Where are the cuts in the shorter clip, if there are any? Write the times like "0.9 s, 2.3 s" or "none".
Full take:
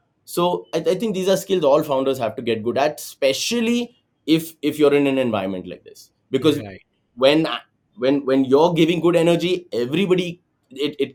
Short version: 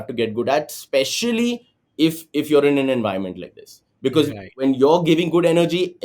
4.6 s